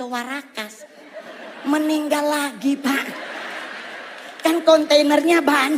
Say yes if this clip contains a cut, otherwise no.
no